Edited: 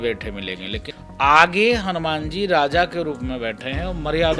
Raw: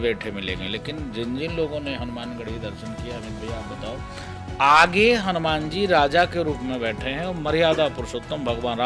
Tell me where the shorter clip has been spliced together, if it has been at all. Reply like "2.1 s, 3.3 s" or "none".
1.0 s